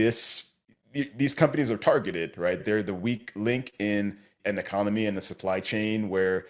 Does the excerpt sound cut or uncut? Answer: cut